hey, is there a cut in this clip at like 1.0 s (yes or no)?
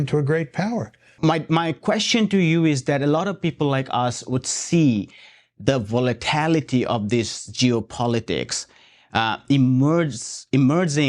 yes